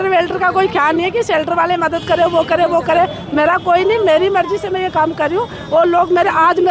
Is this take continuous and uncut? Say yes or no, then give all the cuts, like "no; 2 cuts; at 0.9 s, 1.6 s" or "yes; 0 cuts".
yes; 0 cuts